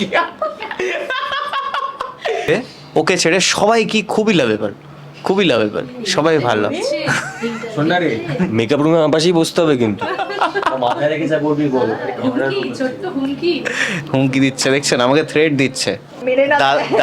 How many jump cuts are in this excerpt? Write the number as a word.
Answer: two